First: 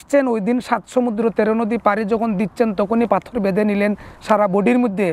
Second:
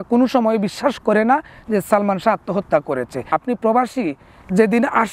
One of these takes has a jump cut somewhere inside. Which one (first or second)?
second